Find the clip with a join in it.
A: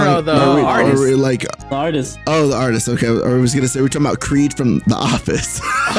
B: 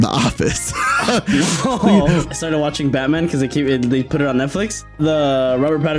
B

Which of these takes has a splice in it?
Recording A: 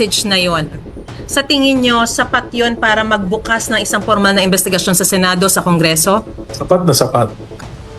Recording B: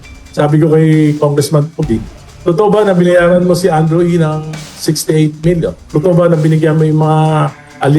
B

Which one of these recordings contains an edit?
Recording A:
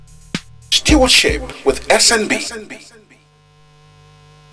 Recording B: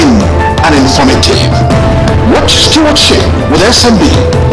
A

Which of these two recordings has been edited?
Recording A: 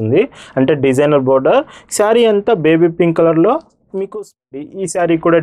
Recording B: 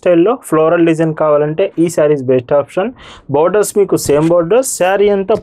A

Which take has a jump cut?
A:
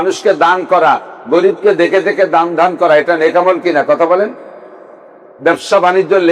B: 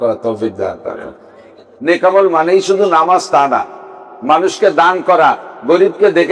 B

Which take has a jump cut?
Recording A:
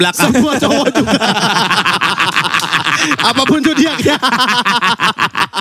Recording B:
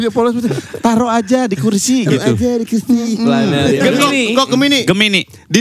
B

